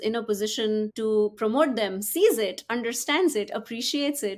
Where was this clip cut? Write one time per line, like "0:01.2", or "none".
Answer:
0:00.9